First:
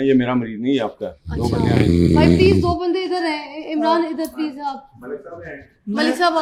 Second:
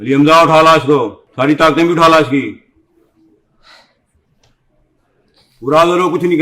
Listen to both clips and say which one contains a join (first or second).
second